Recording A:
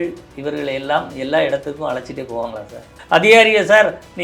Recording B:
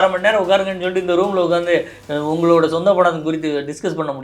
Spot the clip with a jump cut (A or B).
A